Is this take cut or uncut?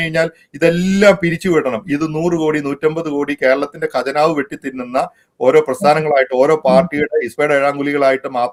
uncut